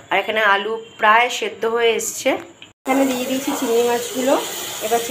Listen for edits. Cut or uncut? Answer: cut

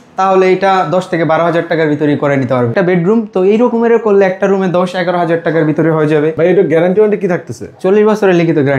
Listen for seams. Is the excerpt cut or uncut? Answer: cut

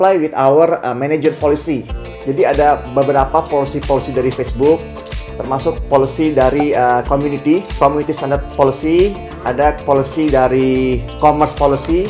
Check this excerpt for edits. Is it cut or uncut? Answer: uncut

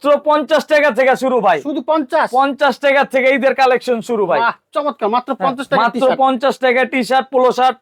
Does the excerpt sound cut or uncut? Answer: uncut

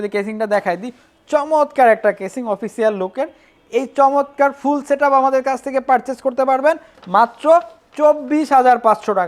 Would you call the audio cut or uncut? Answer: uncut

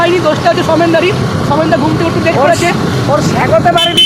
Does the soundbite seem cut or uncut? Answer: uncut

